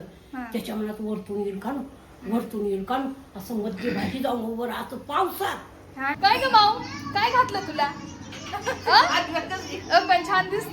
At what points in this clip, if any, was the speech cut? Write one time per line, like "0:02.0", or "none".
0:06.2